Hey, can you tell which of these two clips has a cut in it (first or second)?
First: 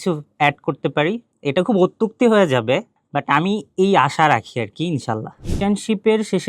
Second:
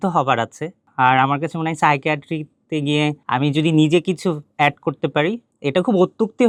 first